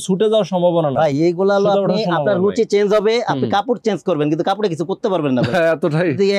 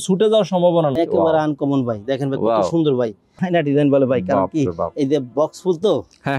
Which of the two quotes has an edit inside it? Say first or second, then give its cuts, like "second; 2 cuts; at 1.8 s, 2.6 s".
second; 2 cuts; at 0.9 s, 3.3 s